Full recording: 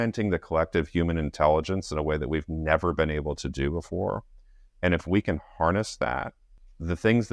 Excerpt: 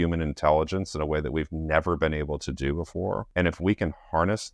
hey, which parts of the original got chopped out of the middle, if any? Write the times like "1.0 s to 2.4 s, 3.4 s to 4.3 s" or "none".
4.2 s to 4.7 s